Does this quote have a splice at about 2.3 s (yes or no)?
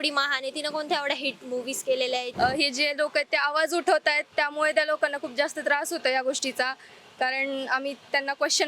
yes